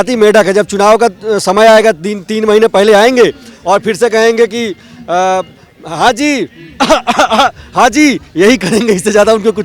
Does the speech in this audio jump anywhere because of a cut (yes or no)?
no